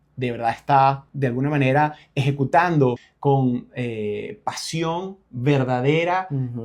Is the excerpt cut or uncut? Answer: cut